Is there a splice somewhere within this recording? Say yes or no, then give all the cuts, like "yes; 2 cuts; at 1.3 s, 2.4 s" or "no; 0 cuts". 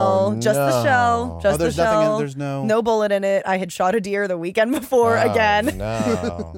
no; 0 cuts